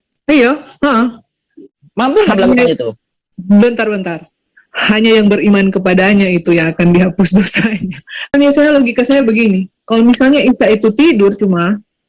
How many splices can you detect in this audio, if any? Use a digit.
2